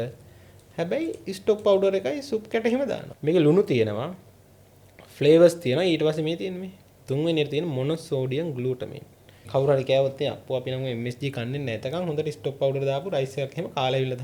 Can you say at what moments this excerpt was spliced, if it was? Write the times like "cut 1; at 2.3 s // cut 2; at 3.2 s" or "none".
cut 1; at 3.1 s // cut 2; at 9.3 s